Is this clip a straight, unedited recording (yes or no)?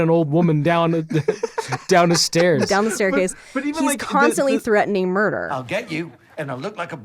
no